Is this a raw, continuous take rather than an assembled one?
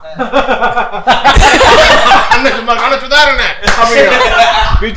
yes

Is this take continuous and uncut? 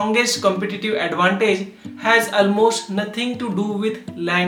yes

